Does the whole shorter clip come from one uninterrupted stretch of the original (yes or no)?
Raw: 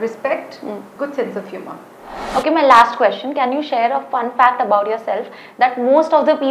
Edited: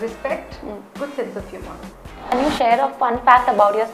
no